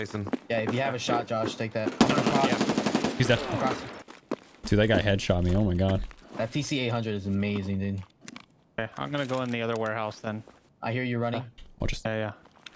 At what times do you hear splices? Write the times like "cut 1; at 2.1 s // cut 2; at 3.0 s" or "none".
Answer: cut 1; at 4.0 s // cut 2; at 6.2 s // cut 3; at 10.7 s